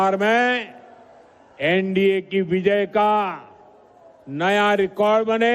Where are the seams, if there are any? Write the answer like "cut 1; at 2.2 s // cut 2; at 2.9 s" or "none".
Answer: cut 1; at 3.3 s